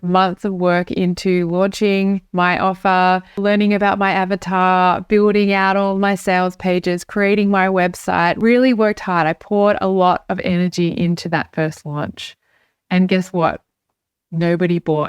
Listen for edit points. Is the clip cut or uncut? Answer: cut